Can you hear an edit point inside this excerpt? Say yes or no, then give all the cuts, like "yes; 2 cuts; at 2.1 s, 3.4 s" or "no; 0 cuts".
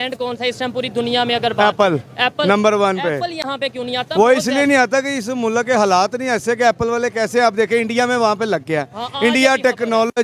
no; 0 cuts